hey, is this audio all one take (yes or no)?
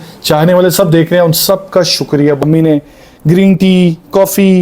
no